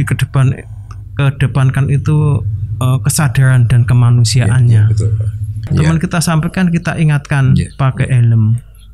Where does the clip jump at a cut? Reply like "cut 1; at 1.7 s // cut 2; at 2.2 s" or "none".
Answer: cut 1; at 5.7 s